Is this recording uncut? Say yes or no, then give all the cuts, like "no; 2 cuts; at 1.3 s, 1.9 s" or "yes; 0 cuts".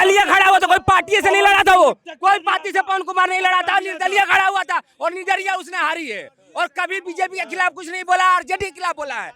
yes; 0 cuts